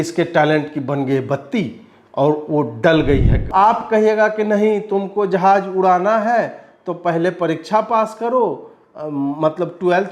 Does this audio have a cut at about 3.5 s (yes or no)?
yes